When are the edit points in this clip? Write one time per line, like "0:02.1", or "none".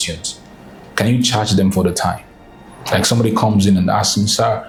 none